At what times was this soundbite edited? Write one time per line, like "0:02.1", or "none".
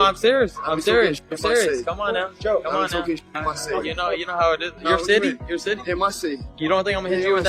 0:02.5